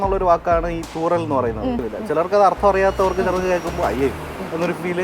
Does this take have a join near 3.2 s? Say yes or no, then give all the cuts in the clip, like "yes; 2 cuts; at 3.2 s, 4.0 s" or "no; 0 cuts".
no; 1 cut; at 1.8 s